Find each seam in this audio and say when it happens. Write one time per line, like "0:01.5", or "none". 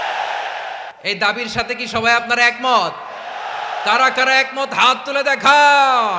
0:00.9

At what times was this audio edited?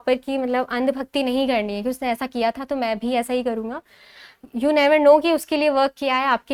none

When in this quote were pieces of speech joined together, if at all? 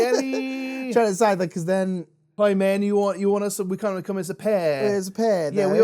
0:02.2

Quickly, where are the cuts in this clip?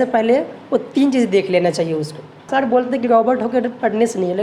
0:02.5

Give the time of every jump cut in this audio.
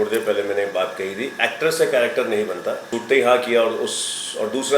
0:02.9

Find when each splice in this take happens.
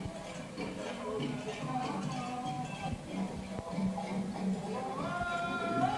0:04.4

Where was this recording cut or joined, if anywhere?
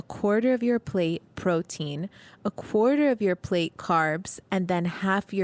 none

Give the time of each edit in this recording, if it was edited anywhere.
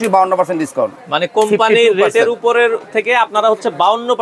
none

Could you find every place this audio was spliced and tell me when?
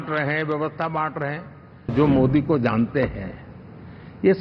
0:01.9

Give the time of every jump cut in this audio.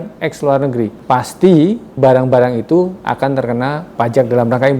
0:01.0
0:03.9

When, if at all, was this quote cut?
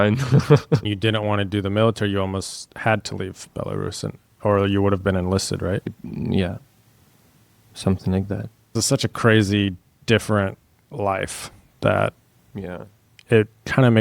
0:00.9
0:06.0
0:08.8

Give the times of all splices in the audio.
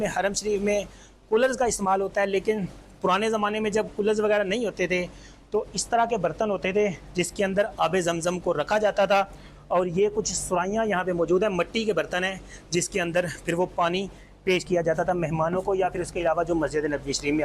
none

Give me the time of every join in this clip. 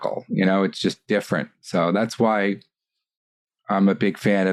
none

